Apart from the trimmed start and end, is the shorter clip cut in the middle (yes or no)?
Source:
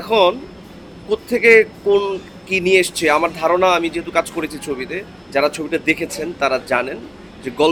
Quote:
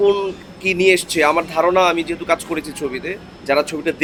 no